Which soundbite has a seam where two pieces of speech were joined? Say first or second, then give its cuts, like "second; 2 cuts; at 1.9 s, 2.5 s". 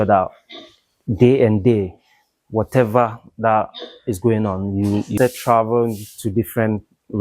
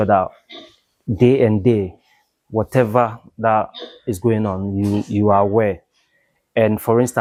first; 1 cut; at 5.2 s